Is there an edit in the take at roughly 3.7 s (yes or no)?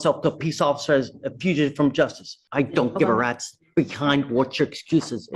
no